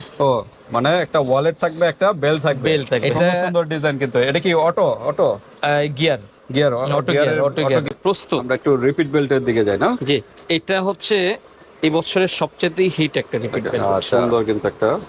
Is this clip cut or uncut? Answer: cut